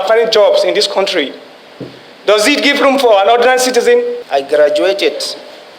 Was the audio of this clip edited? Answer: yes; 1 cut; at 4.2 s

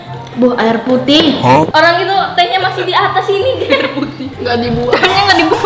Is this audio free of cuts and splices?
no; 1 cut; at 1.7 s

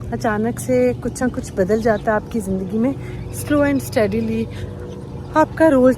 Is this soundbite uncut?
yes; 0 cuts

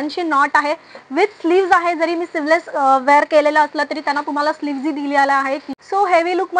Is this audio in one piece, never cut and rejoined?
no; 1 cut; at 5.7 s

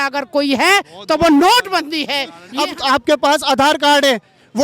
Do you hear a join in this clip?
yes; 1 cut; at 2.4 s

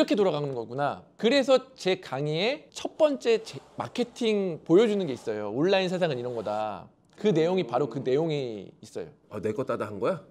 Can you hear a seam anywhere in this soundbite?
no; 0 cuts

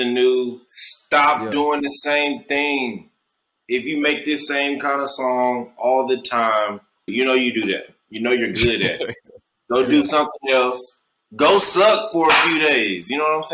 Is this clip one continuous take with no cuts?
no; 1 cut; at 7.1 s

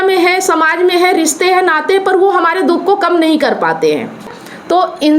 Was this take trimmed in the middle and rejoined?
yes; 1 cut; at 4.3 s

